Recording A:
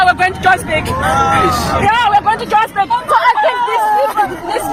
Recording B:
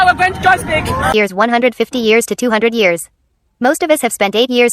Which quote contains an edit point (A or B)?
B